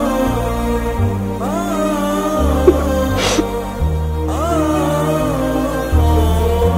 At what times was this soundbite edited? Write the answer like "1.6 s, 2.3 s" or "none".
none